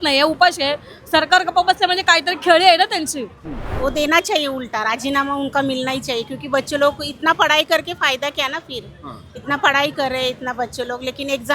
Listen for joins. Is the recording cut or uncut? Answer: cut